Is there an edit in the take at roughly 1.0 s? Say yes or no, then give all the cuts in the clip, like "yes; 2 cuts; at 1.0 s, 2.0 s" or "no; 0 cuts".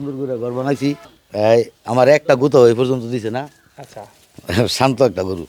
yes; 1 cut; at 1.0 s